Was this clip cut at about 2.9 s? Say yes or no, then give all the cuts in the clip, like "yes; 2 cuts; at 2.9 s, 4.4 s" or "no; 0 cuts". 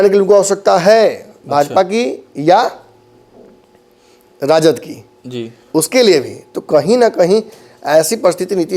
no; 0 cuts